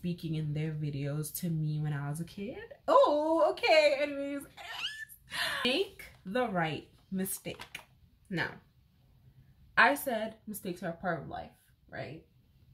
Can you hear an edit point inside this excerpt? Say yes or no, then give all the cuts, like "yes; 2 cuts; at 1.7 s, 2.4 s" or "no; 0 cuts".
yes; 1 cut; at 5.6 s